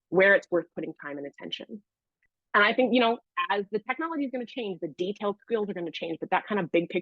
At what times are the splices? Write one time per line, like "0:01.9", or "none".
0:02.0